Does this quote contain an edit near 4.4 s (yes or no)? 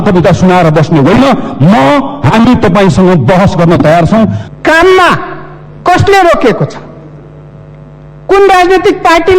yes